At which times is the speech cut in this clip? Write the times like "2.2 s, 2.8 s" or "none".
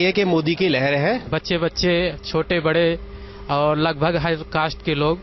1.3 s